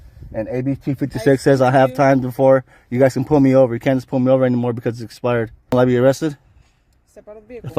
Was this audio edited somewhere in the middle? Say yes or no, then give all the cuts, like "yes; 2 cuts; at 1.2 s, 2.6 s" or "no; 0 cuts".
yes; 1 cut; at 5.7 s